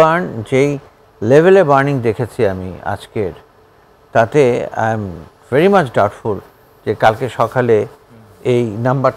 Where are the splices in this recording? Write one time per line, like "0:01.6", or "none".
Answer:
none